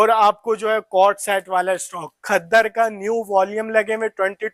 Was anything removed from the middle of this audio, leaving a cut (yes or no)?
no